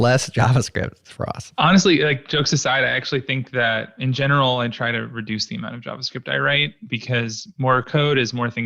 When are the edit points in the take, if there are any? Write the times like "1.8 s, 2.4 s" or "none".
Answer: none